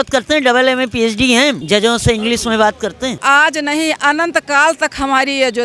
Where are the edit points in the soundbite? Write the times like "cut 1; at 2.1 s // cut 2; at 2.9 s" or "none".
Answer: cut 1; at 1.6 s // cut 2; at 3.2 s